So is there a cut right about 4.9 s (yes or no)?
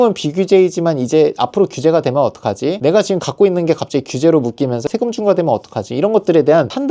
yes